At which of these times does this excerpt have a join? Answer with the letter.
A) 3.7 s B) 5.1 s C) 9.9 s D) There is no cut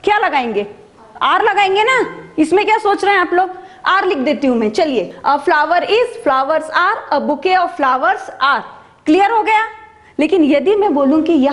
B